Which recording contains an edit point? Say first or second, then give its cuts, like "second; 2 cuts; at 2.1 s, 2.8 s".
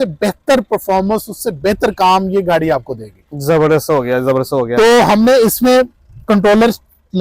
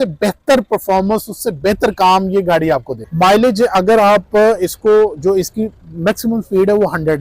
second; 1 cut; at 3.0 s